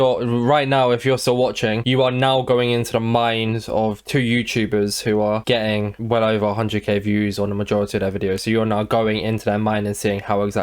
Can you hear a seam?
no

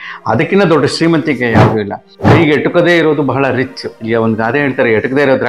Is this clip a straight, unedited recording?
no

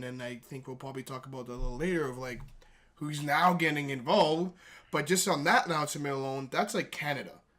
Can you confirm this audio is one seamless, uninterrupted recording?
no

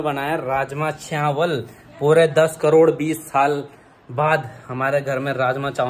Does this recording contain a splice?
no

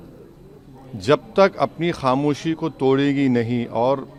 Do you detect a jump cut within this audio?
no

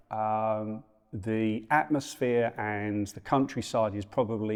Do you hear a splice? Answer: no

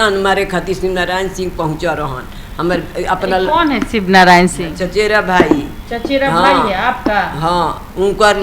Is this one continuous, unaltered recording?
yes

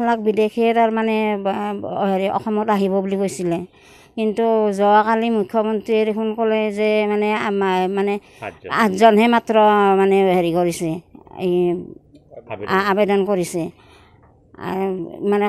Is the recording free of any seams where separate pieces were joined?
yes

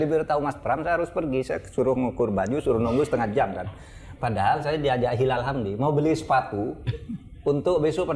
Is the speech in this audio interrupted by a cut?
no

